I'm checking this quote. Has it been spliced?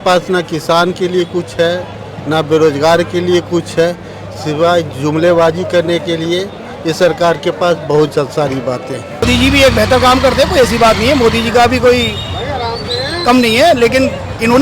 yes; 1 cut; at 9.2 s

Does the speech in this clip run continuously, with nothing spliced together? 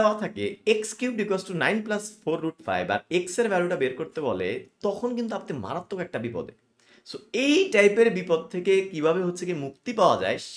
yes; 0 cuts

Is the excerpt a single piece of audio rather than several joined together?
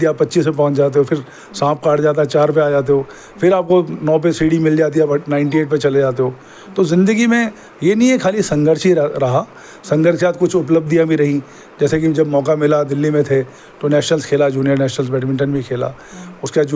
yes; 0 cuts

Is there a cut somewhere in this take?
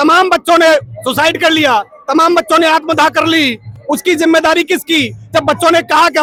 no; 0 cuts

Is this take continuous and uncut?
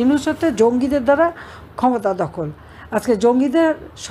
yes; 0 cuts

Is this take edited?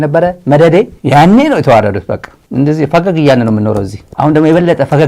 yes; 1 cut; at 1.0 s

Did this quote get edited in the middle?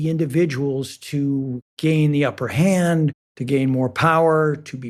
no; 0 cuts

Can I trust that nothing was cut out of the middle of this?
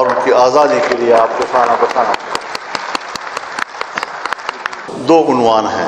no; 1 cut; at 4.9 s

